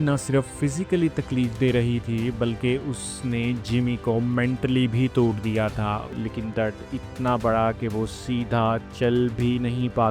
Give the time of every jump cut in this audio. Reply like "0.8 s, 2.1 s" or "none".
6.1 s